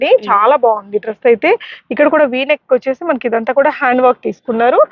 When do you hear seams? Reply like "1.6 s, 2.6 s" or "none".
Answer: none

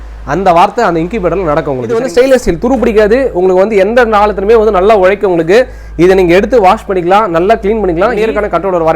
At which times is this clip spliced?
2.0 s, 8.2 s

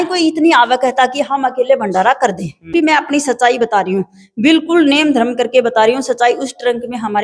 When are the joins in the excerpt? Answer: 2.7 s

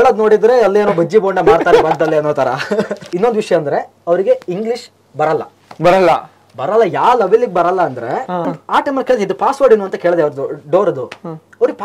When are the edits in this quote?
3.1 s, 8.6 s

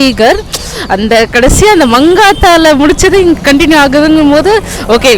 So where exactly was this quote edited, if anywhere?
none

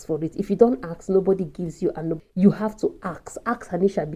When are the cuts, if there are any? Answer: 2.2 s

